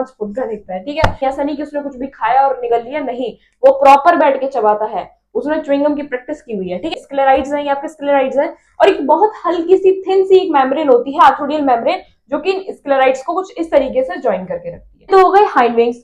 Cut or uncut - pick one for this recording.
cut